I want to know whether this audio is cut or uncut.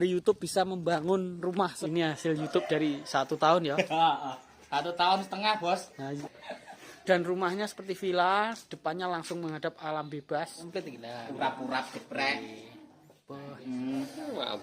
cut